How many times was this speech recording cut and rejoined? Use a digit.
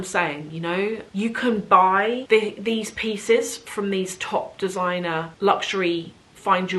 3